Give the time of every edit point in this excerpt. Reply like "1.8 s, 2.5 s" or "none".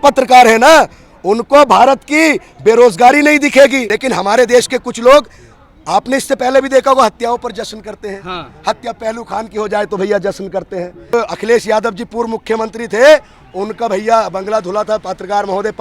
3.9 s, 11.1 s